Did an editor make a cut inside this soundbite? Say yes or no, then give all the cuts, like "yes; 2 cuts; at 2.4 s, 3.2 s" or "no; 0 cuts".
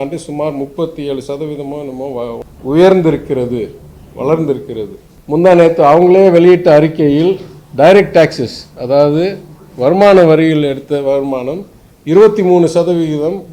no; 0 cuts